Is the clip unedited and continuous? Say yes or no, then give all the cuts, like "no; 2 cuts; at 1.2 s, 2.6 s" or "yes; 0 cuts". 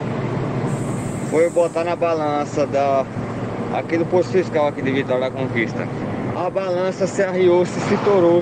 no; 1 cut; at 6.0 s